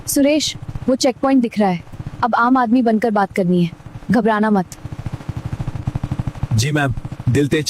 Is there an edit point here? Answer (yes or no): no